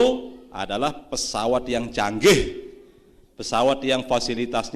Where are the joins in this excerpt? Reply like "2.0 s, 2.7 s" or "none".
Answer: none